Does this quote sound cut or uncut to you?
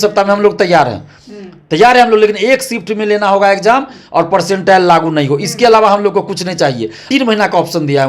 cut